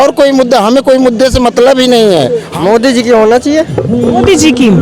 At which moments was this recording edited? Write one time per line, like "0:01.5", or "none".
0:02.5